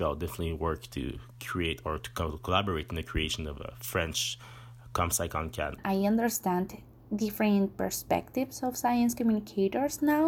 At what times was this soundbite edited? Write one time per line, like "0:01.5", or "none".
0:05.8

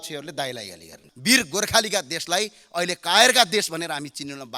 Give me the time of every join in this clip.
0:01.1

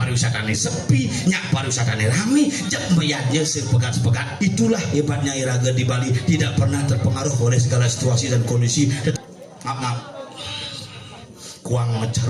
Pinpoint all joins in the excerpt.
0:09.2

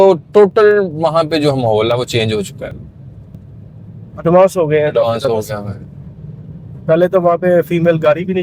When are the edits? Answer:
none

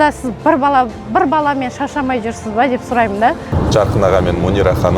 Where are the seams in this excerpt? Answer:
0:03.5

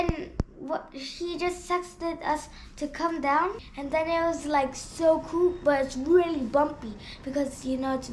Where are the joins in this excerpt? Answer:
0:03.7

